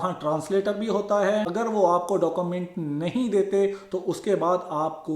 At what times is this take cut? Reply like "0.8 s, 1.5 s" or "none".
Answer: 1.5 s